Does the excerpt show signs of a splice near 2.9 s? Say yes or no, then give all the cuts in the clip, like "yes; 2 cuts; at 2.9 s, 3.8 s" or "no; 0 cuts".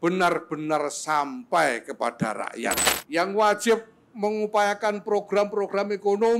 yes; 1 cut; at 2.9 s